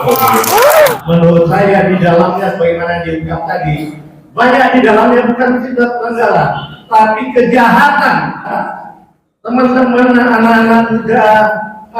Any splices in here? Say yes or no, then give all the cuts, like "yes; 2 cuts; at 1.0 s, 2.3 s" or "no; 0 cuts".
yes; 2 cuts; at 0.9 s, 8.6 s